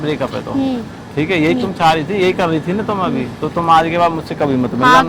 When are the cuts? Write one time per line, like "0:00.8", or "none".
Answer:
none